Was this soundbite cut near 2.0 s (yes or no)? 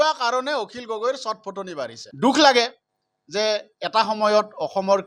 yes